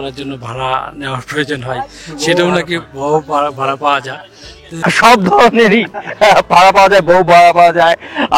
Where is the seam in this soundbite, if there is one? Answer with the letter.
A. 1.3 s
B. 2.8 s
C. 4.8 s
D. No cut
C